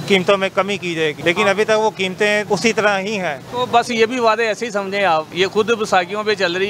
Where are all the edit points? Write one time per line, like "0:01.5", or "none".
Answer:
0:01.2
0:02.4
0:03.4
0:05.3